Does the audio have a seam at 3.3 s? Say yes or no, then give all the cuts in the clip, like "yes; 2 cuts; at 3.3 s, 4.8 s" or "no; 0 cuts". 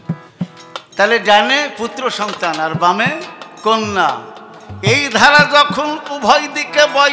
no; 0 cuts